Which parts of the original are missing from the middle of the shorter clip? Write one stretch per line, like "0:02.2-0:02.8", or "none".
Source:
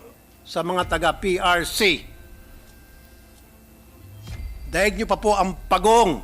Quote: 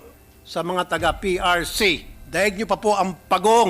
0:02.1-0:04.5